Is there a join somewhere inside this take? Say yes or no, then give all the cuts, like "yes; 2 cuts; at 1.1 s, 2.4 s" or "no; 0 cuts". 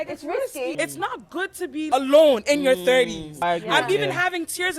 yes; 3 cuts; at 0.8 s, 1.9 s, 3.4 s